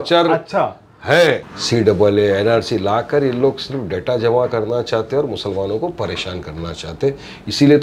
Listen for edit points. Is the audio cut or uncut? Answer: cut